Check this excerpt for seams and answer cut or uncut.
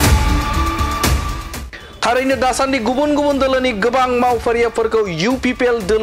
cut